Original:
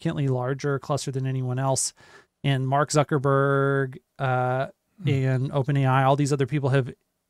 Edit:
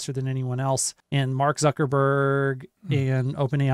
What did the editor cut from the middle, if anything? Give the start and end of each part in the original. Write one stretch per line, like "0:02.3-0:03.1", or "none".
0:01.9-0:02.3
0:04.0-0:04.9